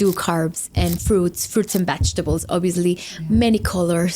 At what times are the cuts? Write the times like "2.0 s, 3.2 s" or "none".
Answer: none

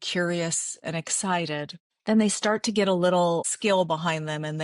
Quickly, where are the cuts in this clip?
1.8 s, 3.5 s

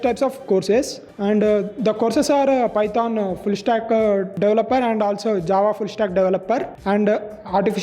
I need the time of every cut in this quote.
1.0 s, 4.3 s, 6.7 s

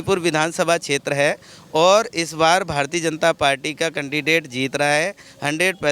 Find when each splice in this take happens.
none

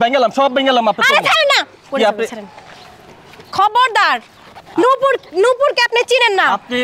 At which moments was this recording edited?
none

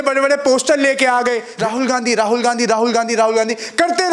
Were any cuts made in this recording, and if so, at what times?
1.5 s

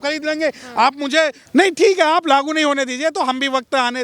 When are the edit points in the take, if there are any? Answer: 1.4 s

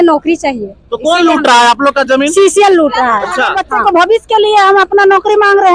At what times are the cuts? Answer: 3.7 s

